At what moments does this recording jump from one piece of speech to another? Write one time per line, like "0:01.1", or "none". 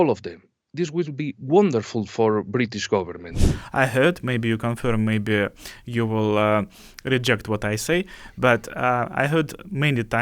0:03.5